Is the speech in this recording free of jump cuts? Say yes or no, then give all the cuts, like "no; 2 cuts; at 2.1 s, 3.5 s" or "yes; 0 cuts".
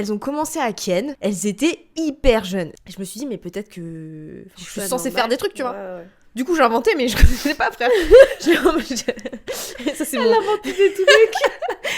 no; 2 cuts; at 1.1 s, 2.8 s